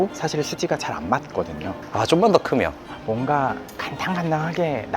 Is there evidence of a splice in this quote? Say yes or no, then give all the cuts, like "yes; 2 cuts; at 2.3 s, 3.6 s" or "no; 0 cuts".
yes; 2 cuts; at 1.8 s, 2.9 s